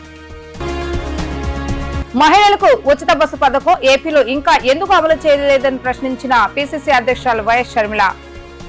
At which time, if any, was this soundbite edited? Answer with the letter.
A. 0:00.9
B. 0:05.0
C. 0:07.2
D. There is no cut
D